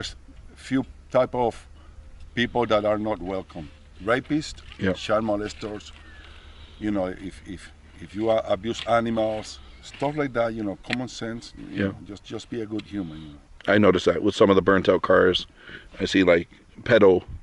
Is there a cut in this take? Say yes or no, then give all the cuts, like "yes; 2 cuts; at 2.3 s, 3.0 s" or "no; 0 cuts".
no; 0 cuts